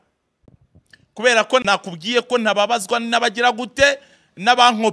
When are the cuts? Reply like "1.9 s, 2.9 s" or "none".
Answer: 1.6 s